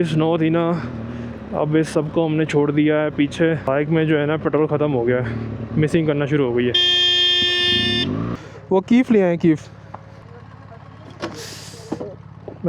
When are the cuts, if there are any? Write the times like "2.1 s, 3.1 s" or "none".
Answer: 3.6 s, 8.4 s

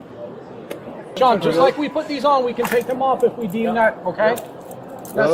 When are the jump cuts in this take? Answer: 1.0 s

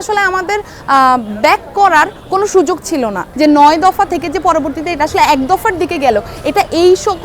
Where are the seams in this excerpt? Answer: 3.2 s

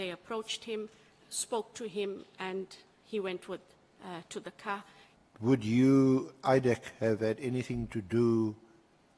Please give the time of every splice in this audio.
5.0 s

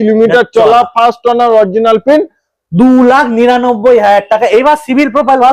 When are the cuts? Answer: none

